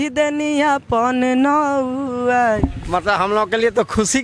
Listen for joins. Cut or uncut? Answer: cut